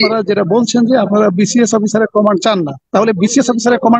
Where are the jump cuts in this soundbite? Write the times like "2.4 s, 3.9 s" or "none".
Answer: 2.8 s

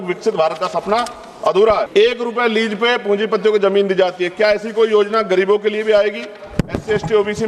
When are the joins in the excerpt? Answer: 1.9 s

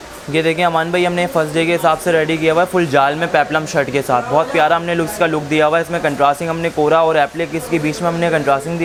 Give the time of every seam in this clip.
none

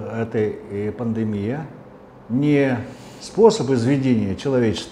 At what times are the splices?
none

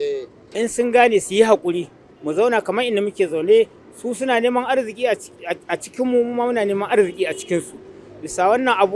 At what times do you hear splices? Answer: none

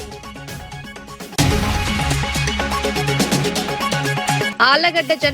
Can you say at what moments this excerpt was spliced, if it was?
1.4 s, 4.5 s

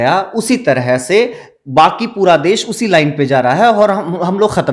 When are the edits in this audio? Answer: none

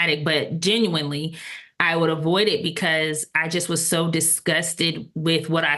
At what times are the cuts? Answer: none

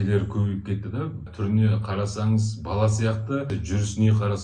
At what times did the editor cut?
1.3 s, 3.6 s

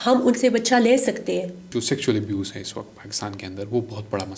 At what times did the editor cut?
1.7 s

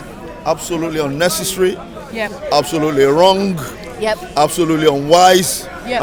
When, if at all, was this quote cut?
none

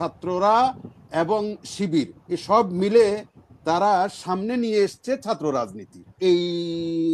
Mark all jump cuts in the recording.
6.1 s

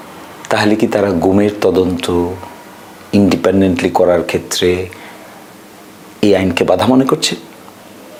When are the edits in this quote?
none

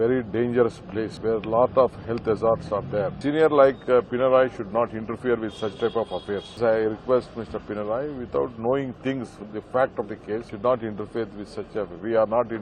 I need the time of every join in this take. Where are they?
1.1 s, 3.2 s, 6.6 s, 10.5 s

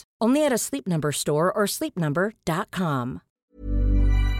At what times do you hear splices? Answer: 3.4 s

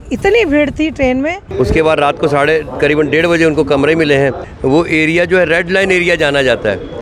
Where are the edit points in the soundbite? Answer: 1.4 s, 4.5 s

